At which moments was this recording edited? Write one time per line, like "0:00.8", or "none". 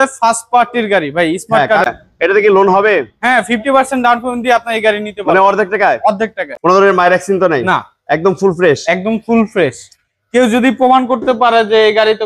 0:01.8
0:06.5